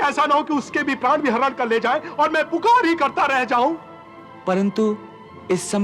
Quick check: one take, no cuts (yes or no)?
yes